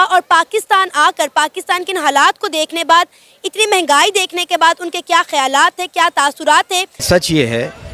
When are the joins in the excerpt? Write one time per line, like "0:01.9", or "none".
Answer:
0:07.0